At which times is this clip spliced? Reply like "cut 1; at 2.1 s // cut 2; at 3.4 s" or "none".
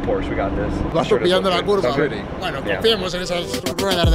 cut 1; at 0.9 s